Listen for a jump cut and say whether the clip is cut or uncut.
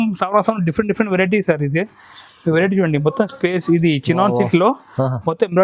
uncut